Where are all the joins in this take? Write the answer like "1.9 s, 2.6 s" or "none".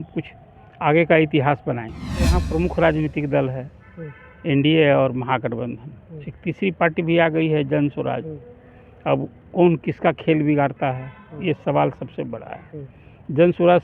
2.3 s